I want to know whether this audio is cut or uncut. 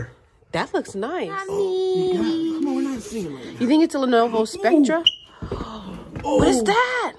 cut